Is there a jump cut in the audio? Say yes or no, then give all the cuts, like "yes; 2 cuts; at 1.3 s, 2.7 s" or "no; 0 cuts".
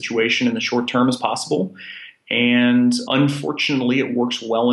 yes; 1 cut; at 3.0 s